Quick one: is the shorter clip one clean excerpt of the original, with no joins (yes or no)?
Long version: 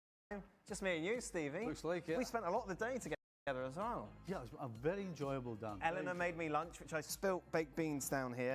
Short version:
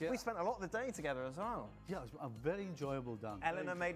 no